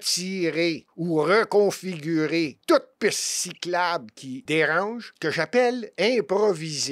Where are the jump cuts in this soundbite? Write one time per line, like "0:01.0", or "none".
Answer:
0:00.9
0:02.6
0:04.3
0:05.1